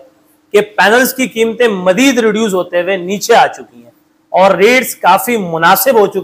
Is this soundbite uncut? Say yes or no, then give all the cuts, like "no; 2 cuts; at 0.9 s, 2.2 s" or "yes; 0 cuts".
yes; 0 cuts